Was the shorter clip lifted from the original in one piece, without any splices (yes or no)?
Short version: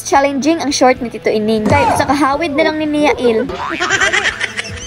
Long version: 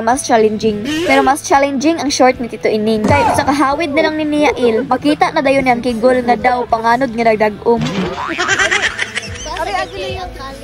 no